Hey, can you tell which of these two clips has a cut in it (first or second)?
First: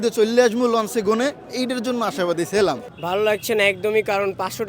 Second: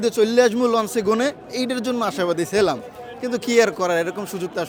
first